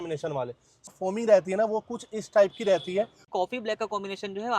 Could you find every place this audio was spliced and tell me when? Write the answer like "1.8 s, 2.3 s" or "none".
0.9 s, 3.2 s